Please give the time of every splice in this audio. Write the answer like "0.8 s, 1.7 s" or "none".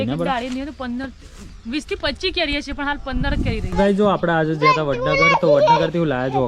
3.7 s